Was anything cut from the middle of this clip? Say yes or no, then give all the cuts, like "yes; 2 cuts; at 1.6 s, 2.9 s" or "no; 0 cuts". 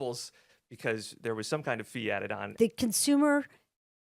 yes; 1 cut; at 2.5 s